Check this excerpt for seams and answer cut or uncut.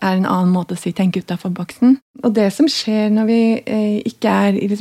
cut